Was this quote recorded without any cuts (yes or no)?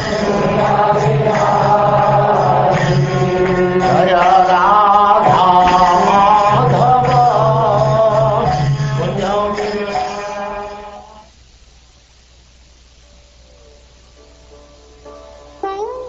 no